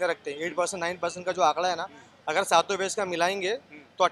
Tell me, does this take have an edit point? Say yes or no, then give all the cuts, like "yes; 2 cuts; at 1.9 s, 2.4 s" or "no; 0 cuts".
no; 0 cuts